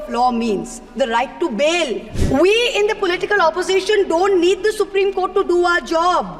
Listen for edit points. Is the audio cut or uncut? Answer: cut